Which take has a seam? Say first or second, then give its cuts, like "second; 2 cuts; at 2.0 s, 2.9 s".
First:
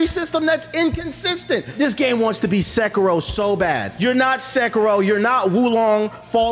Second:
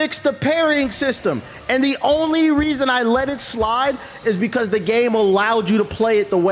first; 2 cuts; at 1.7 s, 3.9 s